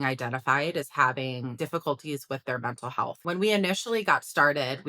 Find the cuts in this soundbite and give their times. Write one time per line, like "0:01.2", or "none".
0:01.5
0:03.2